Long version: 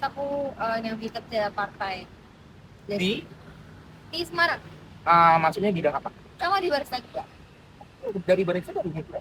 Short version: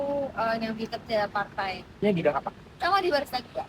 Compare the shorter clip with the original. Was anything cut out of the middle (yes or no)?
yes